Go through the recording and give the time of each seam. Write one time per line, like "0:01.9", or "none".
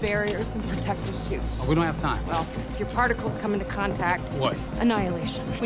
none